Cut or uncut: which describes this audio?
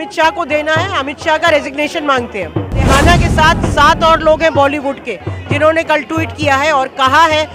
cut